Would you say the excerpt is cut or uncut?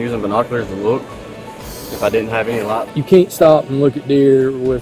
cut